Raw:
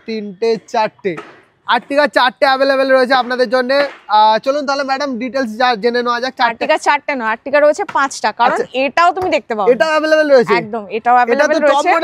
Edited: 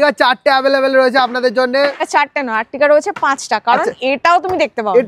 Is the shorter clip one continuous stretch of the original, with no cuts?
no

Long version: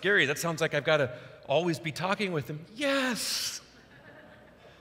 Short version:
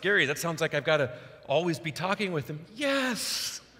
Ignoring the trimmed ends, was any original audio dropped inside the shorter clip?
no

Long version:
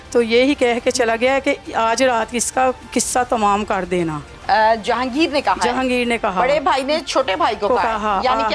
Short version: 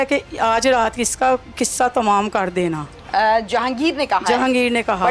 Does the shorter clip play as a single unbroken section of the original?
yes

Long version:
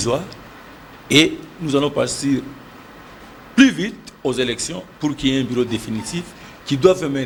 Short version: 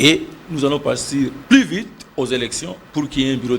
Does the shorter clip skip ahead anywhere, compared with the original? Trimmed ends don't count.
yes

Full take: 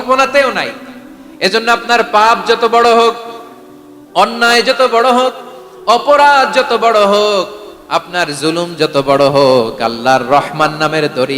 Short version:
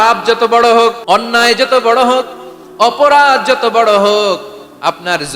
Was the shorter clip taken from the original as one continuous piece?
no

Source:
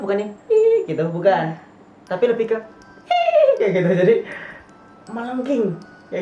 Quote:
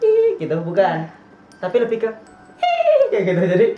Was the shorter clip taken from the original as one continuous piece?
yes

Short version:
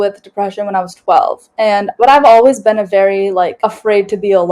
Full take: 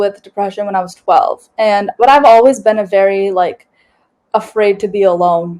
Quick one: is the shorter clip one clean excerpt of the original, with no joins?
no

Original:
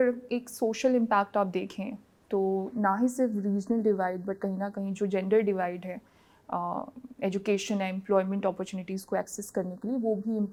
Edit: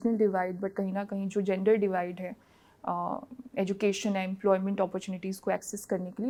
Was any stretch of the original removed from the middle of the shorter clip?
no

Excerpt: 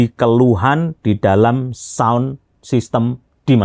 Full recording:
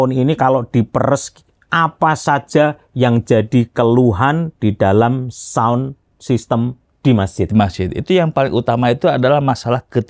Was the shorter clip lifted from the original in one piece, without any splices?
yes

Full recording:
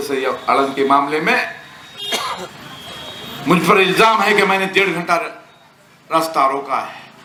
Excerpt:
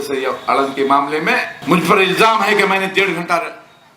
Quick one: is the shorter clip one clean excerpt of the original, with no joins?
no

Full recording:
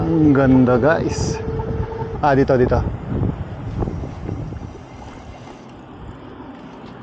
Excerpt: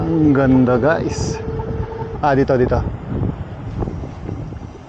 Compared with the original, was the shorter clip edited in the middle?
no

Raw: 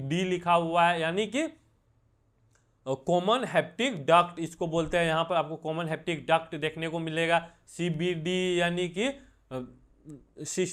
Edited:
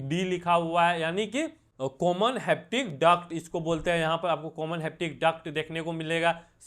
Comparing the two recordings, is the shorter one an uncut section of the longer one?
no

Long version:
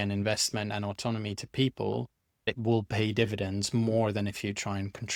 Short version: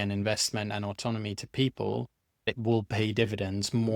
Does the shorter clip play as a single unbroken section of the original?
yes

